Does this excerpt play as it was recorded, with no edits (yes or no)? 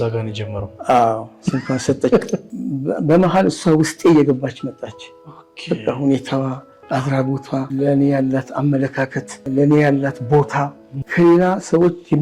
no